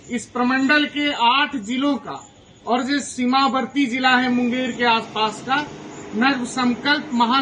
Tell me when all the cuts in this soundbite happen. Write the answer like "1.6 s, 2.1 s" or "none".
none